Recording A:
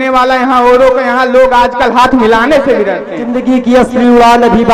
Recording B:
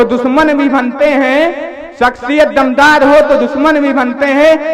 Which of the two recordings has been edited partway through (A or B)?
A